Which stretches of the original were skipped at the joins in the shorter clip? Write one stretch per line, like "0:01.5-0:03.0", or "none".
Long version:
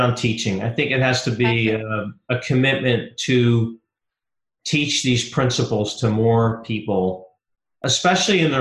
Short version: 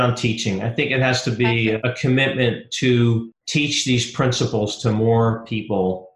0:01.8-0:02.3
0:03.8-0:04.5